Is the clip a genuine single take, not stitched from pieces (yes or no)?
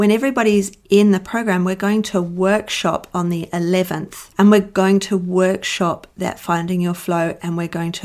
yes